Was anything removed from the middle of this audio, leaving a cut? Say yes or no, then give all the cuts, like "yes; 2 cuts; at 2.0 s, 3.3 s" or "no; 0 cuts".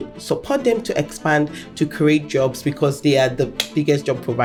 no; 0 cuts